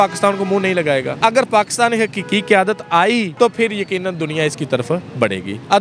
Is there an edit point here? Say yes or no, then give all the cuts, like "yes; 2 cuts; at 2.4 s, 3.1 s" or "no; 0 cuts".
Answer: no; 0 cuts